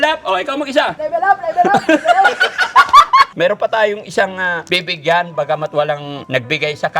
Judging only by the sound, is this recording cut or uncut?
cut